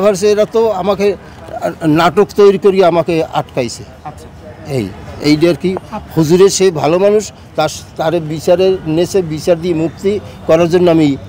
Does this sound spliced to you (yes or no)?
no